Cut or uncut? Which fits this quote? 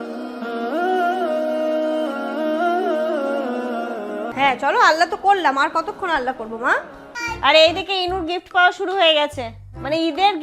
cut